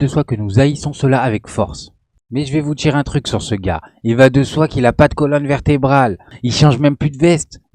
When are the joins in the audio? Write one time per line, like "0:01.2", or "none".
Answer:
none